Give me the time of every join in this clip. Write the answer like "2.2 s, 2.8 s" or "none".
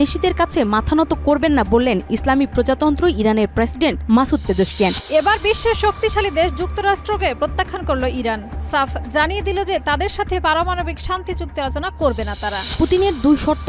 5.0 s, 12.7 s